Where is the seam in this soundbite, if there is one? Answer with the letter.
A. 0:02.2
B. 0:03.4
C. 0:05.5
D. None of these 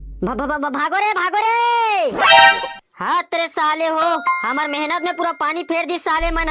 D